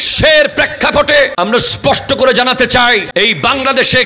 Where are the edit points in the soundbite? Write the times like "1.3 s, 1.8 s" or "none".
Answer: 1.3 s, 3.1 s